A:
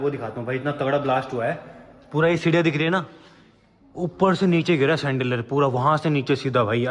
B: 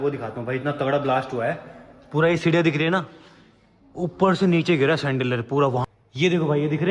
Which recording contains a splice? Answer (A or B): B